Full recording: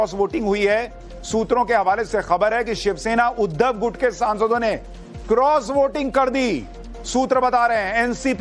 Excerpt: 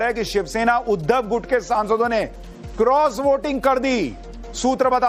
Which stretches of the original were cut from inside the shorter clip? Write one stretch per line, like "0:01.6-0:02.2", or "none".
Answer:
none